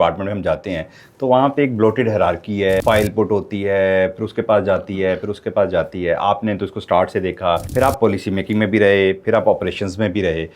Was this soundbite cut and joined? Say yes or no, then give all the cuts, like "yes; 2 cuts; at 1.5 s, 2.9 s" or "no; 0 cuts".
yes; 2 cuts; at 2.8 s, 7.7 s